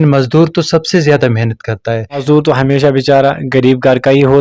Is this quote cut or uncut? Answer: cut